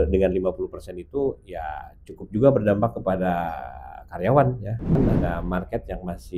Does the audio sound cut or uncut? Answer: cut